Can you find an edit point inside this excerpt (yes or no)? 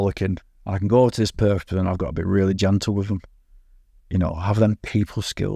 no